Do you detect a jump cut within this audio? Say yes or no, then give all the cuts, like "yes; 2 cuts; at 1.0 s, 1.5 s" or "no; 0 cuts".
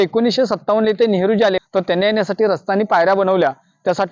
yes; 1 cut; at 1.6 s